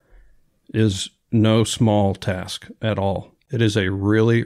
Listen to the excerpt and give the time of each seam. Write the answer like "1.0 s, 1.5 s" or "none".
3.4 s